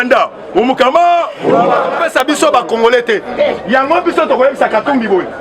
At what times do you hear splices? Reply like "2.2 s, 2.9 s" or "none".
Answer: 2.0 s